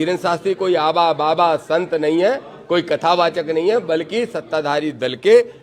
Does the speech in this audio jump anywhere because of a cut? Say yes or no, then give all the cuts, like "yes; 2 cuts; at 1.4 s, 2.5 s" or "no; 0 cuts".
no; 0 cuts